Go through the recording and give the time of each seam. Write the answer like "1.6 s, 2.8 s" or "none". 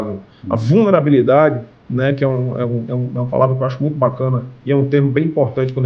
none